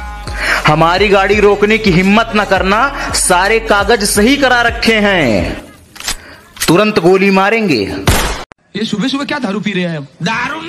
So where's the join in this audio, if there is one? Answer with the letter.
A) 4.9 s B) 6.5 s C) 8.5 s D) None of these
C